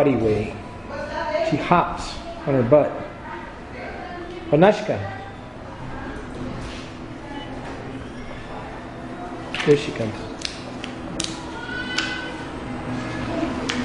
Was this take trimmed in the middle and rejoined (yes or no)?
yes